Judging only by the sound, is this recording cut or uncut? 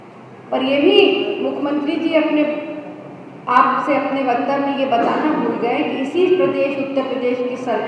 uncut